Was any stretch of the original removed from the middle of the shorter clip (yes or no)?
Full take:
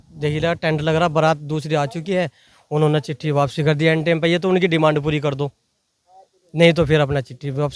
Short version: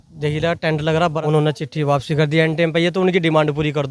yes